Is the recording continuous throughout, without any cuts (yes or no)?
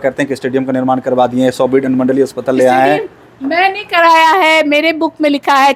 yes